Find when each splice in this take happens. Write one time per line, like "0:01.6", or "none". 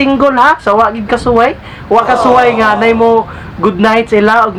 none